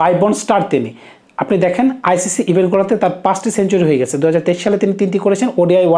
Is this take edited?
no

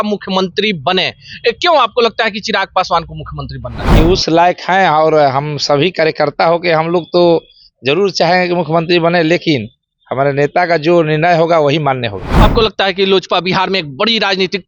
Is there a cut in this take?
yes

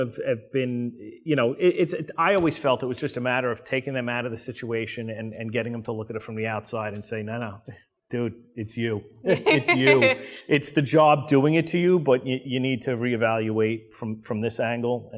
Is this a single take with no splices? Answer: yes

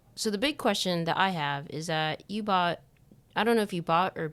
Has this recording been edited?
no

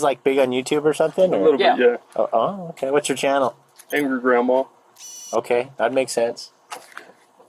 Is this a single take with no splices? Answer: yes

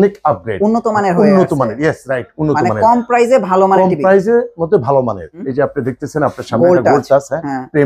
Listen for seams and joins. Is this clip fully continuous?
no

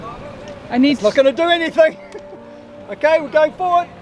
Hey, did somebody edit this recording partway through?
no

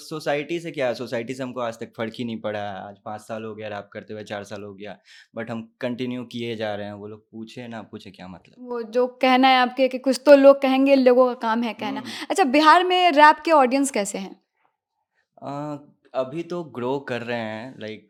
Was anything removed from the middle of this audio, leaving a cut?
no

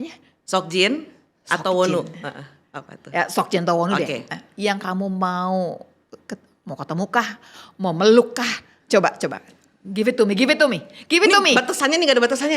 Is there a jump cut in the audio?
no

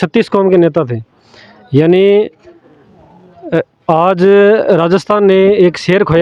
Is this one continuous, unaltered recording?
yes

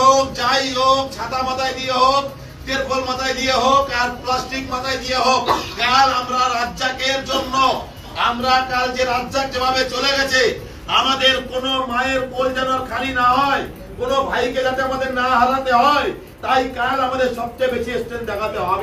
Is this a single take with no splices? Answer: yes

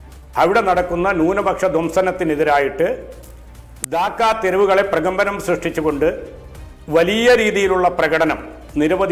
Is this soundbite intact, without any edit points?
yes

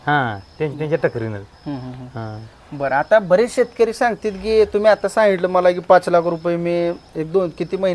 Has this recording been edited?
no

